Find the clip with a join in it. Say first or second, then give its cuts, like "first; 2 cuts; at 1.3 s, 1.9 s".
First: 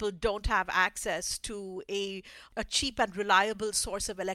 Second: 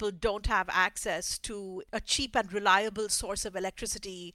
second; 1 cut; at 1.8 s